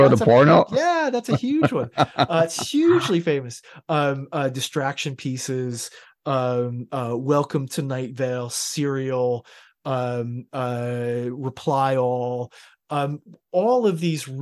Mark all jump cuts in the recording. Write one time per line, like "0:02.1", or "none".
none